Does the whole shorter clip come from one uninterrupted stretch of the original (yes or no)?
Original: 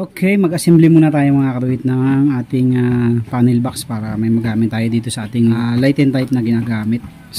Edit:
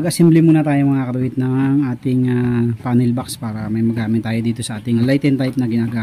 no